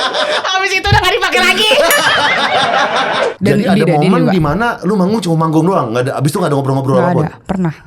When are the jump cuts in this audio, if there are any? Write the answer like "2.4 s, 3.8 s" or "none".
3.3 s